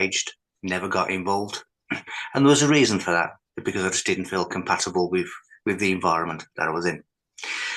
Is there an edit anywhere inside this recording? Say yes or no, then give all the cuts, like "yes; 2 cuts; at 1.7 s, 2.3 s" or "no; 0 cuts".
no; 0 cuts